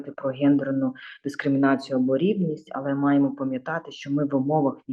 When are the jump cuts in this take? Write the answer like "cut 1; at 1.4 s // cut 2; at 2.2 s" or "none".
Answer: none